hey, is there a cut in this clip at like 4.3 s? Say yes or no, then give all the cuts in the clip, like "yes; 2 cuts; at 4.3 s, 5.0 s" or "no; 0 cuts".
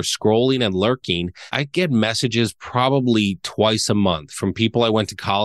no; 1 cut; at 1.6 s